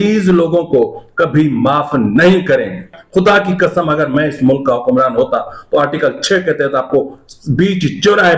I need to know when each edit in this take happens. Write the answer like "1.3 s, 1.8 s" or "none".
3.0 s